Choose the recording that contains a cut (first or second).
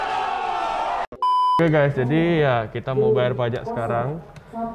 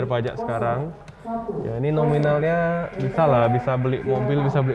first